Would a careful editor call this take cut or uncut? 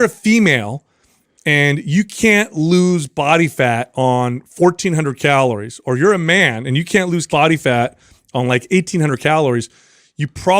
cut